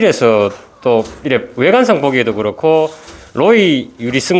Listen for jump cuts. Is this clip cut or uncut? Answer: uncut